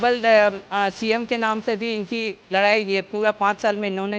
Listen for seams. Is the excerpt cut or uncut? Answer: uncut